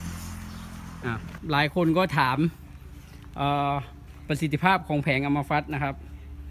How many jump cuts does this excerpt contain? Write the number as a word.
one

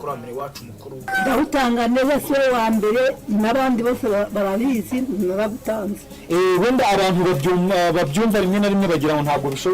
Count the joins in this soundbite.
one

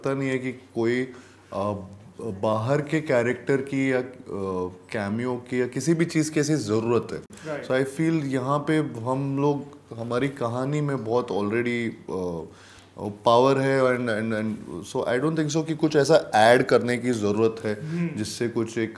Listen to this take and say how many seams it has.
zero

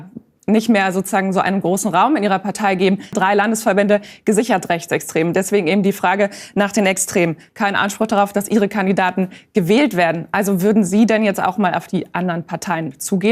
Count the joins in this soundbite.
two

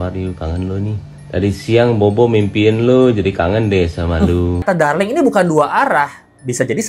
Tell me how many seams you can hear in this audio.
one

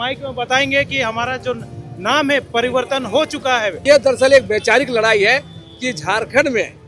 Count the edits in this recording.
one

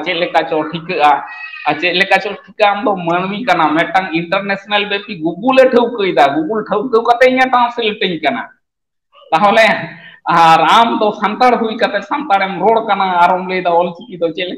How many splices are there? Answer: zero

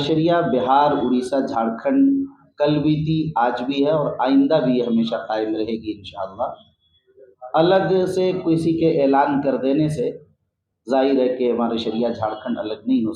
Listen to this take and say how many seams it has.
zero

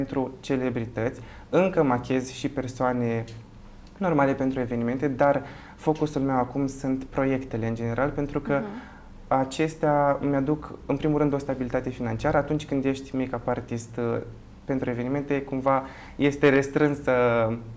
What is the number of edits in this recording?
zero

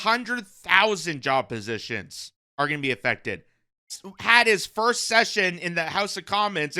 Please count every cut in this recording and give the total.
one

